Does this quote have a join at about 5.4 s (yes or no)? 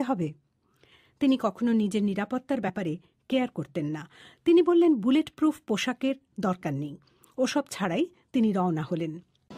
no